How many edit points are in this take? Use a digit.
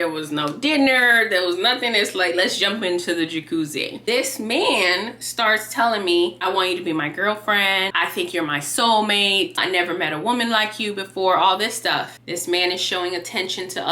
2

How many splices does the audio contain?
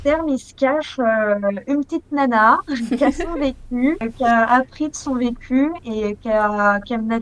1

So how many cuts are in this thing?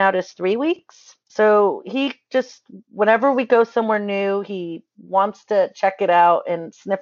1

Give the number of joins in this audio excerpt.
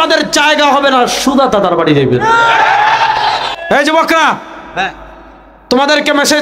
1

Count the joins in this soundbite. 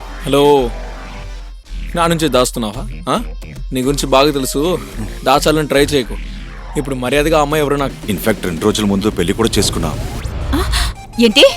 1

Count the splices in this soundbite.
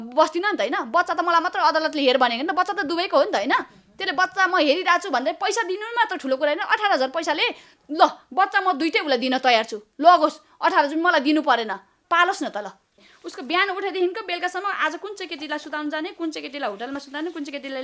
1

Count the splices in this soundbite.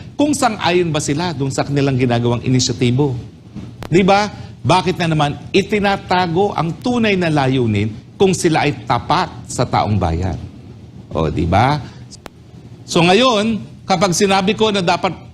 1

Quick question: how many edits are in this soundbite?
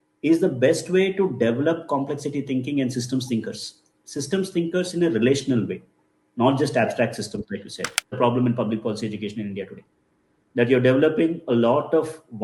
1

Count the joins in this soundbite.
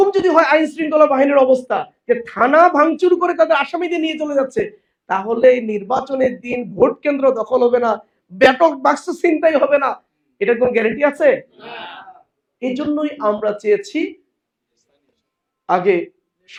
0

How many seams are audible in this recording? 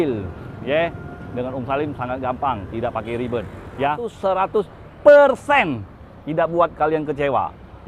1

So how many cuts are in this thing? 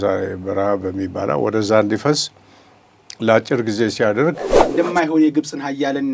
1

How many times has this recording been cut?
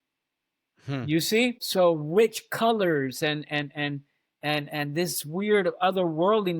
1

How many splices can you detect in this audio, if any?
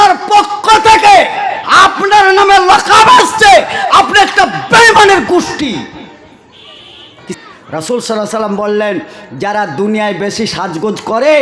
1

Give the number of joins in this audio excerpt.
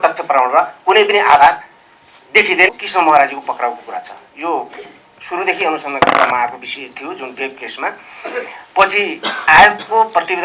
1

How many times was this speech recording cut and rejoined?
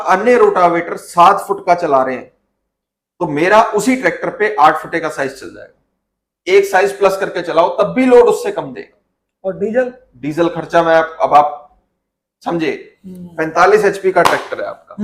0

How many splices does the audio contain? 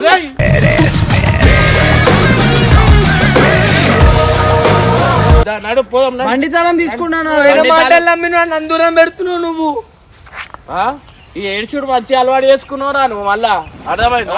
1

